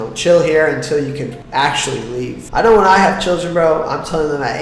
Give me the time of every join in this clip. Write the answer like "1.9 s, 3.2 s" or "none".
2.5 s